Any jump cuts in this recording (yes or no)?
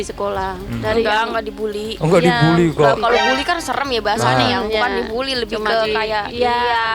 no